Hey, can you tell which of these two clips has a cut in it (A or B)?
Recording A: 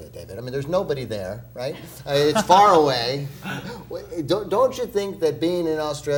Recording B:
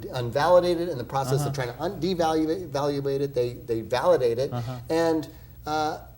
B